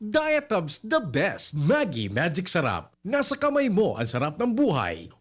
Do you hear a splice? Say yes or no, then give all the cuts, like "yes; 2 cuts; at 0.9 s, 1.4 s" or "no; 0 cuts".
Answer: yes; 1 cut; at 1.5 s